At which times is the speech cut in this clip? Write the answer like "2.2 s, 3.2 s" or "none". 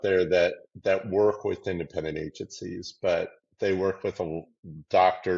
none